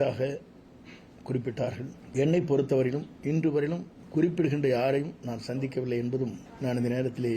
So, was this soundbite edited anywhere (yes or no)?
yes